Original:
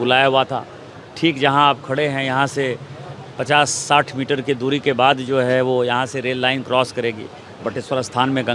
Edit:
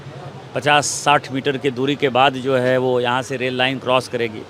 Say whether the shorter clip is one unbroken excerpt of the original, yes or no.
yes